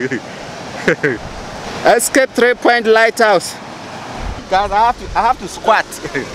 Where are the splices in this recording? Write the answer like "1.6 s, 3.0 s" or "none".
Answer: 1.6 s, 4.3 s